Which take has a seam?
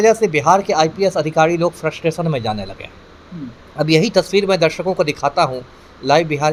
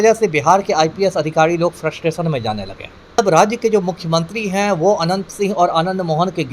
second; 1 cut; at 3.2 s

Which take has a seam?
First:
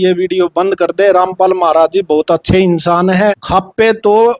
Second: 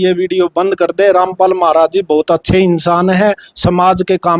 first; 1 cut; at 3.4 s

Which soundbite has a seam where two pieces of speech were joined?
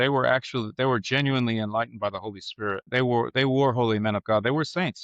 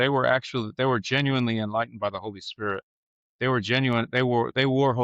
first; 1 cut; at 2.9 s

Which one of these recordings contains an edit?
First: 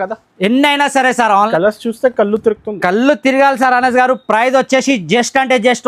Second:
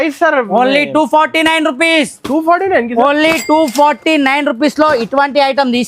first; 1 cut; at 1.5 s

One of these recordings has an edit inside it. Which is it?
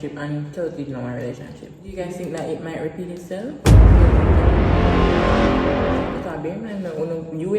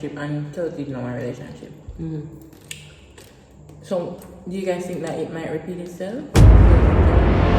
first; 2 cuts; at 1.9 s, 6.2 s

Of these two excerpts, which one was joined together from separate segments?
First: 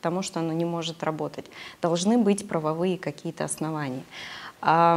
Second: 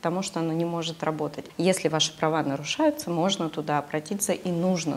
second; 1 cut; at 1.4 s

